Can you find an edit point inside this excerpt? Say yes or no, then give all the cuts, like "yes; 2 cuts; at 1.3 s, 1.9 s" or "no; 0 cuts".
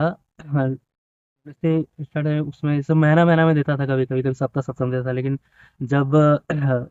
no; 0 cuts